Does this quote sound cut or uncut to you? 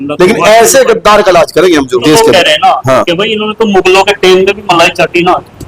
cut